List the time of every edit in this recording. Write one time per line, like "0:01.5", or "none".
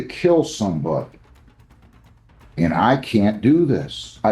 0:01.2
0:02.5